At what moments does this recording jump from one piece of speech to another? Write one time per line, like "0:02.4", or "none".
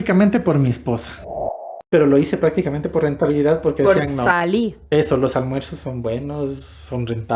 0:01.4